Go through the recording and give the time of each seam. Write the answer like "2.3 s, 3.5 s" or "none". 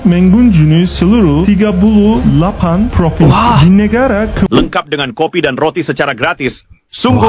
4.5 s